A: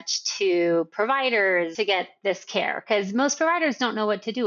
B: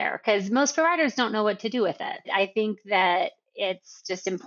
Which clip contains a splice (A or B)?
A